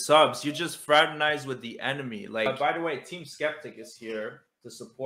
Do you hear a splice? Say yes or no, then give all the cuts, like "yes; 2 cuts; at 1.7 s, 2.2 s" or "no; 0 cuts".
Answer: yes; 1 cut; at 2.5 s